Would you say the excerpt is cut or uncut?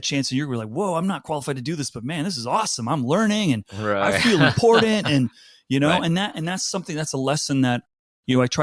uncut